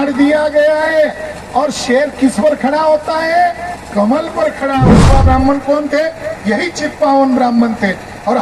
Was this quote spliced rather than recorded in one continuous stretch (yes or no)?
yes